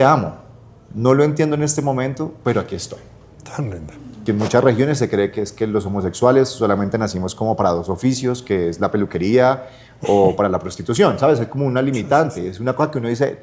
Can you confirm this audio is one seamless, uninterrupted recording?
no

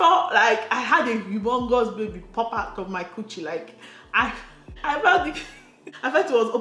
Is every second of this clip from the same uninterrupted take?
yes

